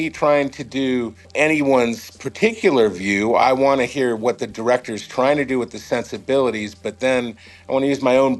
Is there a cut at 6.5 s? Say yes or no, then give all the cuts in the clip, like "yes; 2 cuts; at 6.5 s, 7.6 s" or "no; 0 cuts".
no; 2 cuts; at 1.2 s, 3.4 s